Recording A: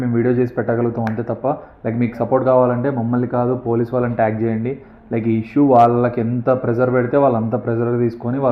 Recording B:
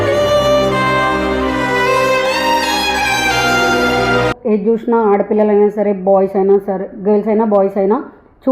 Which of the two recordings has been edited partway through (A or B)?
B